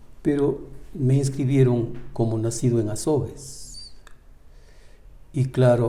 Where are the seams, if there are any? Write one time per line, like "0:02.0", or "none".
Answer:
none